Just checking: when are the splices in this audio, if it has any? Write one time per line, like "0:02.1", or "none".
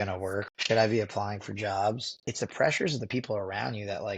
0:02.2